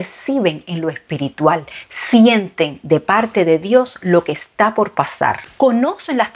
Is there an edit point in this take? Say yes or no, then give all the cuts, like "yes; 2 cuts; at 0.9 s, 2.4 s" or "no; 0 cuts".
yes; 1 cut; at 5.4 s